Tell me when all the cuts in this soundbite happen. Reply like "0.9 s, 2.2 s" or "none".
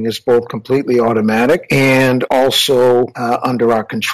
1.9 s, 3.2 s